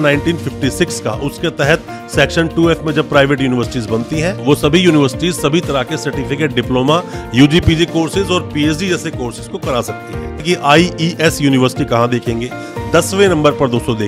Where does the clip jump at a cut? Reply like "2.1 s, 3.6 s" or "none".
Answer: 10.4 s